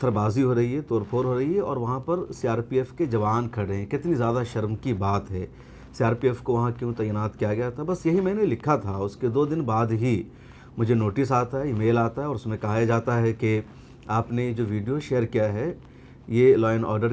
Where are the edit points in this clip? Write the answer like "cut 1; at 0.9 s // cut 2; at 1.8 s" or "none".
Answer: none